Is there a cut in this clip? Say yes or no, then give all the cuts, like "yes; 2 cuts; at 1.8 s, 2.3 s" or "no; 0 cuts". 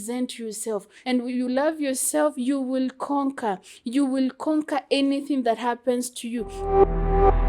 yes; 2 cuts; at 0.9 s, 6.6 s